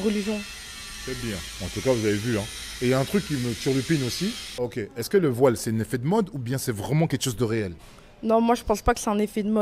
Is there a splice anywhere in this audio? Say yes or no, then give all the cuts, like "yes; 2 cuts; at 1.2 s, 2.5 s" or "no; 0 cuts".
yes; 2 cuts; at 4.6 s, 7.9 s